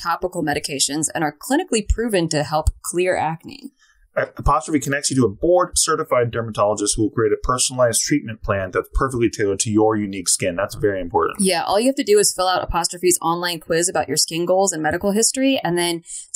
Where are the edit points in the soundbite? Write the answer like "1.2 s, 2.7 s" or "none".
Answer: none

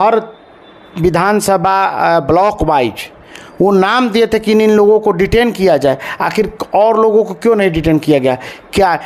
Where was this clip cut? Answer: none

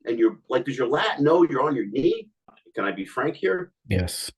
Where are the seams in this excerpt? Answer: 2.5 s

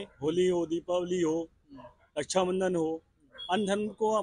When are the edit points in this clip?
none

